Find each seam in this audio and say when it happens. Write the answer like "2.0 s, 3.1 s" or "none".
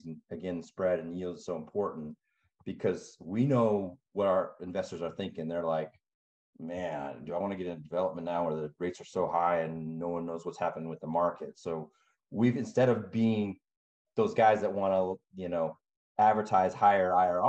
none